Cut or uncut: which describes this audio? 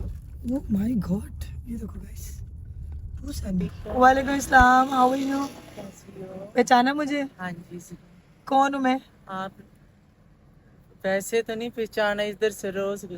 cut